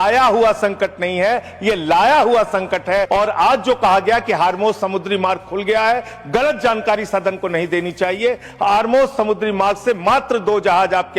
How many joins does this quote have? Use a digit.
1